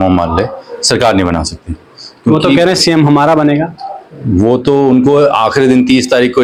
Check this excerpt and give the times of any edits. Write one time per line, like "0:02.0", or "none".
none